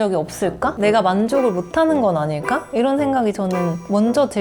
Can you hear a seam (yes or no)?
no